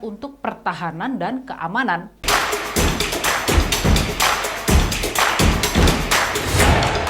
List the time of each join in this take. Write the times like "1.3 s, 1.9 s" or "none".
2.1 s